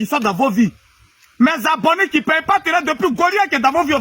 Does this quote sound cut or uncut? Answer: uncut